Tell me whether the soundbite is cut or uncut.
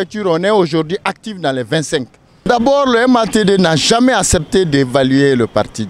cut